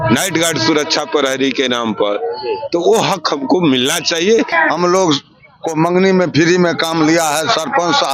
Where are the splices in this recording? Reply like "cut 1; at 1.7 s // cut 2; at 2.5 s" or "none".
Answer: cut 1; at 4.5 s